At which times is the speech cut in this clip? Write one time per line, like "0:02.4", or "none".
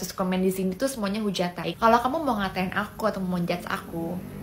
0:01.6